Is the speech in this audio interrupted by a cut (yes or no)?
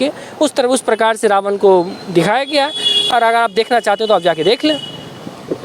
no